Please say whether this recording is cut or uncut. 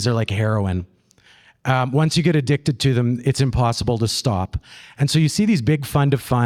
uncut